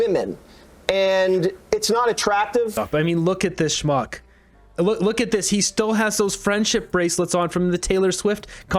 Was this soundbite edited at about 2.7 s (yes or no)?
no